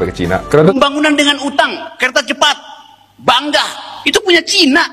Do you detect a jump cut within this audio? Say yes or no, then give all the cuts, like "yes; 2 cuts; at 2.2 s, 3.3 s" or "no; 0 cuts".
yes; 2 cuts; at 0.7 s, 3.9 s